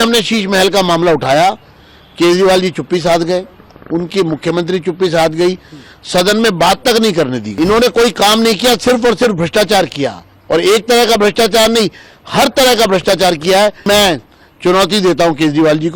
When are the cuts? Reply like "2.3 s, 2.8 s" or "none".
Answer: 7.5 s, 13.8 s